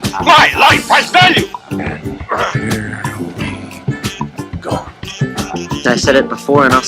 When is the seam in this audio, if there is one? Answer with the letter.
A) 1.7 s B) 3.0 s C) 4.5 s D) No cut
B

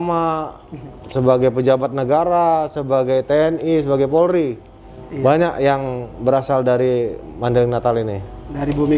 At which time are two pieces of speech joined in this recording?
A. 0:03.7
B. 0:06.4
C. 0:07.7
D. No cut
D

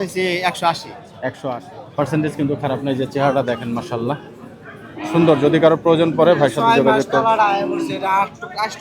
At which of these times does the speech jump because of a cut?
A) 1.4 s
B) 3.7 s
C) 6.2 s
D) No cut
A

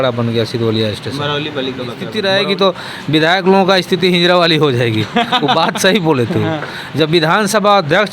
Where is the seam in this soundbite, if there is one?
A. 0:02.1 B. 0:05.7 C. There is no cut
A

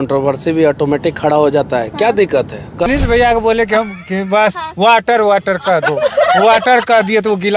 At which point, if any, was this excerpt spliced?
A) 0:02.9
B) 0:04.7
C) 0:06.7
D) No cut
A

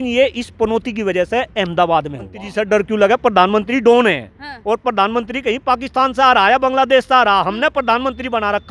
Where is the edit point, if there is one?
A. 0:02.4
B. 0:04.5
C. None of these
A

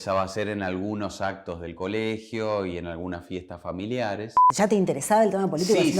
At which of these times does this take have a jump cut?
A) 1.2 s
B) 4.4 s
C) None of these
B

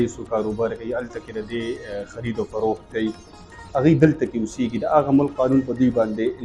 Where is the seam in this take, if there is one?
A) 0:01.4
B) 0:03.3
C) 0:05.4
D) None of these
D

